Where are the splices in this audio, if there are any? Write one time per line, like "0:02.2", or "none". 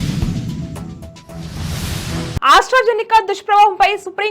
0:02.4